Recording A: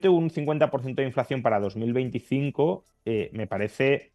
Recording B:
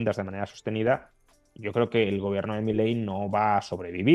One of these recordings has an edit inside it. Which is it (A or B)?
A